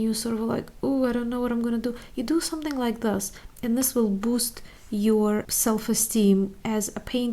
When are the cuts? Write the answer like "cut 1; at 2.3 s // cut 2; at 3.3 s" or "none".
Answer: cut 1; at 5.5 s